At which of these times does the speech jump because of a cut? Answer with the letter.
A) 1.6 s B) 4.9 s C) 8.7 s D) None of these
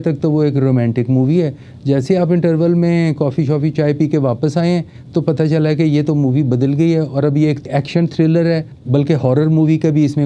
D